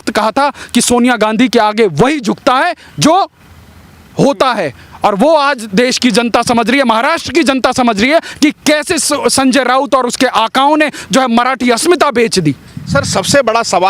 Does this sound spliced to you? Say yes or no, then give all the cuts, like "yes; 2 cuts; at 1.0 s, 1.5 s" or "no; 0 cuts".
no; 0 cuts